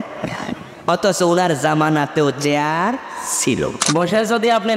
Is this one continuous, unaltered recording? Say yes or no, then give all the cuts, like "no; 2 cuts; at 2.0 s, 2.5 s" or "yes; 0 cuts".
no; 1 cut; at 3.8 s